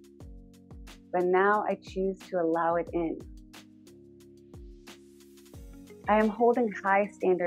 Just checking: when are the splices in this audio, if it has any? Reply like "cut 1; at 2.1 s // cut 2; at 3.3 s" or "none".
none

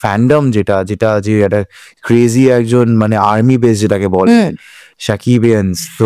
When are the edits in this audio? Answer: none

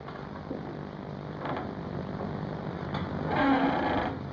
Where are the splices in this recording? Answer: cut 1; at 3.1 s

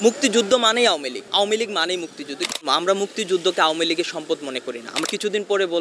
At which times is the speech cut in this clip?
cut 1; at 1.2 s // cut 2; at 2.6 s // cut 3; at 4.9 s

